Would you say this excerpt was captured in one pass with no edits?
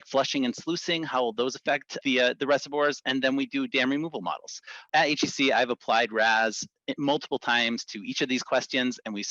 no; 2 cuts; at 1.9 s, 4.9 s

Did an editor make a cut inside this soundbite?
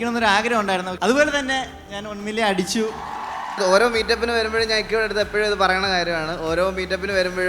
yes; 2 cuts; at 0.9 s, 3.3 s

